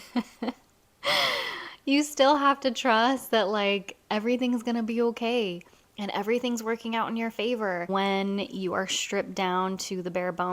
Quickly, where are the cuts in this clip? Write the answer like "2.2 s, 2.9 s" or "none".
7.9 s